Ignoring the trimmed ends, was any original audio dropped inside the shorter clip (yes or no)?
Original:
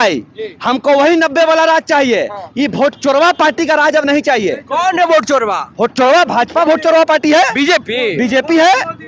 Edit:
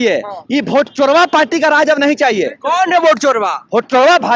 no